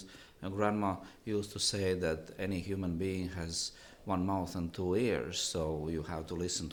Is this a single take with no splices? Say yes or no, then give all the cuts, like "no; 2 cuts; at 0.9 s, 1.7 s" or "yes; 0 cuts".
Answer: yes; 0 cuts